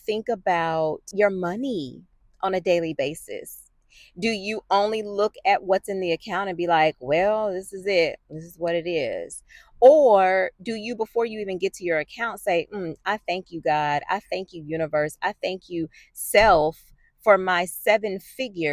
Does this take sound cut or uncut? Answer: cut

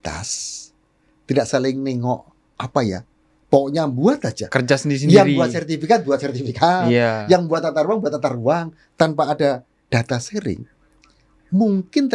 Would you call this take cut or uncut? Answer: uncut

